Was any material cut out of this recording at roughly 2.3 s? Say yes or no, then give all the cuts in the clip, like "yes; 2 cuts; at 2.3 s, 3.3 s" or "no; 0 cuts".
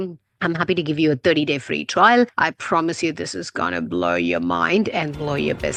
no; 0 cuts